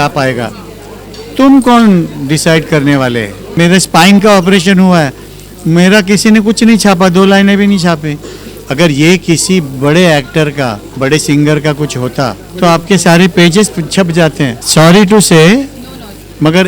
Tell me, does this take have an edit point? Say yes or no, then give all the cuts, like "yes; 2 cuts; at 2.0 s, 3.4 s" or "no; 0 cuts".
yes; 4 cuts; at 3.6 s, 10.8 s, 12.4 s, 14.6 s